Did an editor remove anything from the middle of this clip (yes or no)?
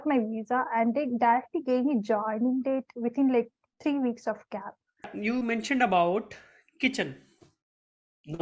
yes